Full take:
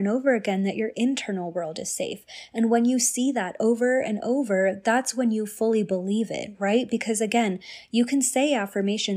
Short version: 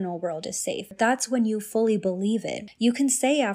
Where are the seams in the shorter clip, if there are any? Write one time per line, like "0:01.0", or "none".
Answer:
0:00.9
0:02.6